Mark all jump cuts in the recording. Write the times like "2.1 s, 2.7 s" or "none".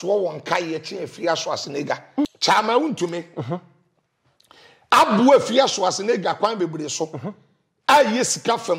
2.4 s